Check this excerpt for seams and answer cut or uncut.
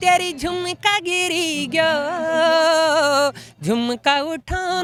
uncut